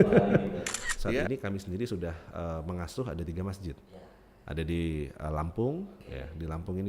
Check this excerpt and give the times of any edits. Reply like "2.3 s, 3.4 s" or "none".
1.2 s